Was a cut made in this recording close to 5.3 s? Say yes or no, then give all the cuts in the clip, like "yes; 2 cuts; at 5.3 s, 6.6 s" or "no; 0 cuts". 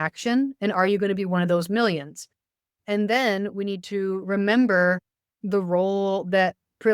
yes; 1 cut; at 5.3 s